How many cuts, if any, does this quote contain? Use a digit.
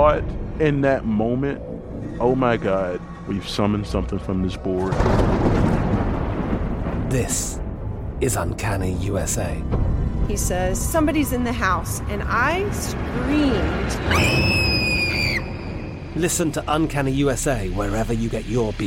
0